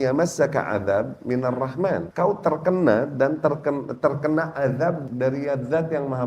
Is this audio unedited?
no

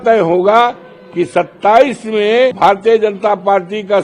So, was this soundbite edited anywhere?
yes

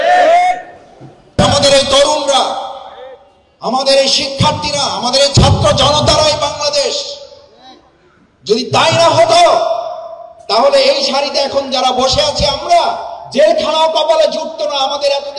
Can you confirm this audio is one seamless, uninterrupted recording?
no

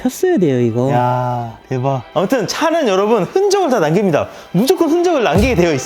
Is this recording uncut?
no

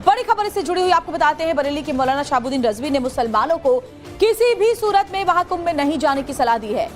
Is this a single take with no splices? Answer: no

